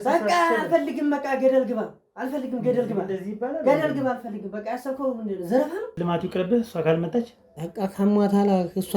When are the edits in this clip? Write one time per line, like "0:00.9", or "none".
0:05.9

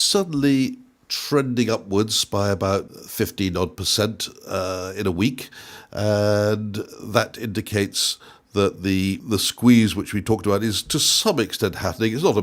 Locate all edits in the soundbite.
0:02.9
0:09.2

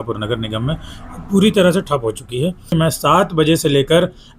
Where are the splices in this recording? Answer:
0:02.7

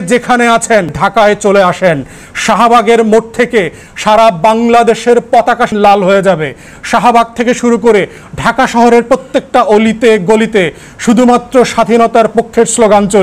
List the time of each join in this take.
0:01.0
0:05.7

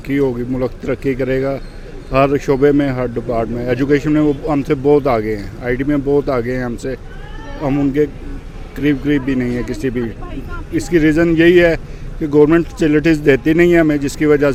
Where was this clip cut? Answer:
none

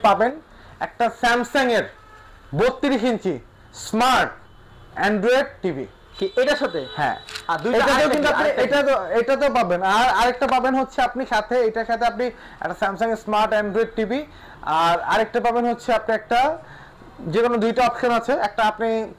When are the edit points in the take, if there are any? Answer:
none

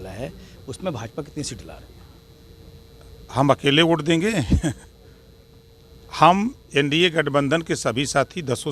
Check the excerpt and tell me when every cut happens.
none

